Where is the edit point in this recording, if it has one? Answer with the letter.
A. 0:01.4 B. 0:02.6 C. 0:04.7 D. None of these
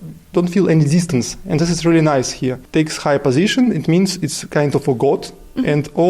B